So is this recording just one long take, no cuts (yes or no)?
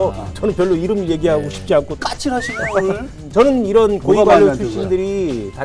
no